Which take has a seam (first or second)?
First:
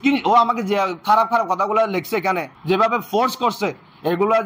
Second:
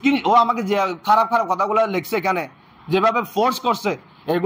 first